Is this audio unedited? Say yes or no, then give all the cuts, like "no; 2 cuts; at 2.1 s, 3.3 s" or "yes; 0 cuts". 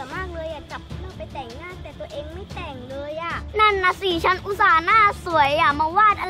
yes; 0 cuts